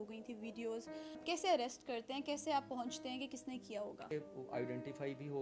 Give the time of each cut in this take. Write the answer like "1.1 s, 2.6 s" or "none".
1.2 s, 4.1 s